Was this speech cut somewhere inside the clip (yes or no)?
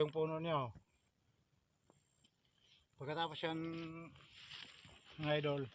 yes